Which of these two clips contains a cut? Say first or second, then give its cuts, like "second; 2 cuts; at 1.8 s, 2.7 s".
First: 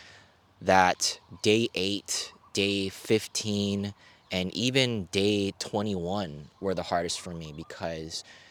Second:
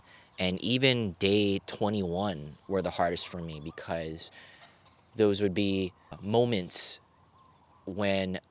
second; 1 cut; at 6.2 s